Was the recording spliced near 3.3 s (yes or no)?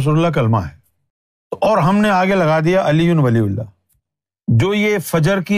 no